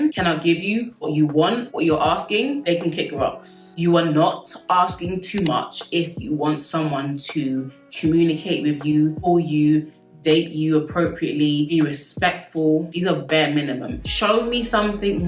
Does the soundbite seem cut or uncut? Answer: uncut